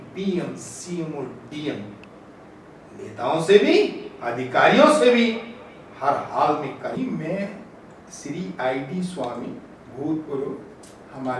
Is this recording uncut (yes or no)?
no